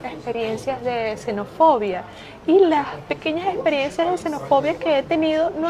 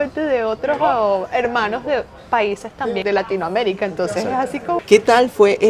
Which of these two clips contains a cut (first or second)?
second